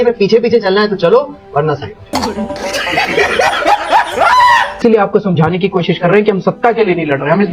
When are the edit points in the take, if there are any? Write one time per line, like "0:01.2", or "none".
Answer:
0:02.1
0:04.8